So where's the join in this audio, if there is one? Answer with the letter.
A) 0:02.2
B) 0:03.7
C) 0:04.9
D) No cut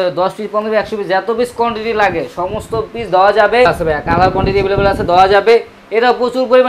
B